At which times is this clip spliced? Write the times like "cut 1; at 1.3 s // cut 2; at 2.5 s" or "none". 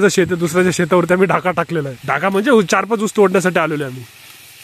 cut 1; at 2.0 s

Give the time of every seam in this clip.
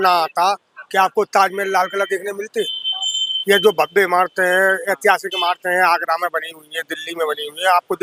none

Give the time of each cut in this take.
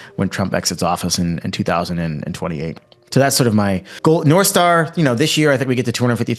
cut 1; at 3.9 s

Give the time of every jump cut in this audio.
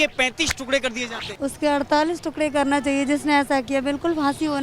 cut 1; at 1.2 s

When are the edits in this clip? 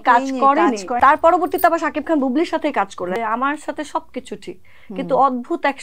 cut 1; at 0.9 s // cut 2; at 3.2 s

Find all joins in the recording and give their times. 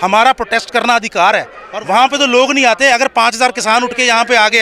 cut 1; at 1.6 s

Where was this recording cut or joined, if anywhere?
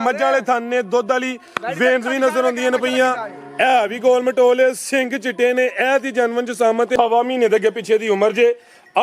cut 1; at 6.9 s

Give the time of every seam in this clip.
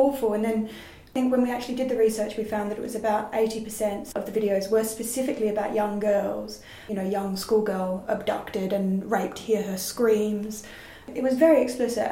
cut 1; at 1.1 s // cut 2; at 4.0 s // cut 3; at 6.8 s

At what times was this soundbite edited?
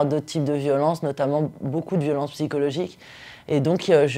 none

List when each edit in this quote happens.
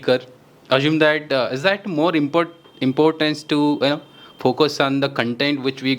none

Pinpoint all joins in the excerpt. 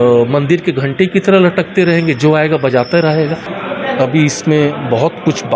cut 1; at 3.5 s

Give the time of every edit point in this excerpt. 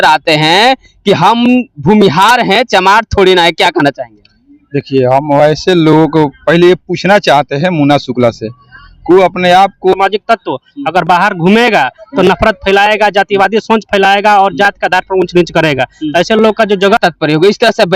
cut 1; at 9.9 s // cut 2; at 17.0 s

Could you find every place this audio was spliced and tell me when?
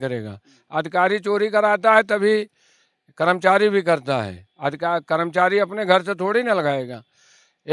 none

